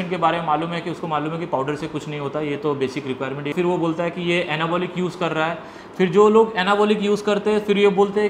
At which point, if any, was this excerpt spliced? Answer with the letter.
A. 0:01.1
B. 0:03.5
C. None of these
B